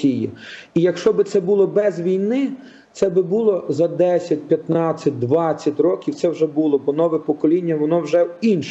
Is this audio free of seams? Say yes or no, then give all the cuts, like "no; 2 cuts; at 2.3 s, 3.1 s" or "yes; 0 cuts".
yes; 0 cuts